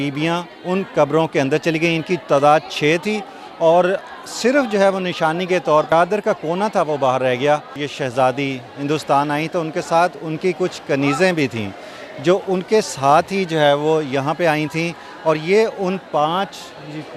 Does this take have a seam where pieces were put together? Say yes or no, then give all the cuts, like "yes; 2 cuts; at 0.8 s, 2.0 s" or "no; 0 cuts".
yes; 2 cuts; at 5.9 s, 7.8 s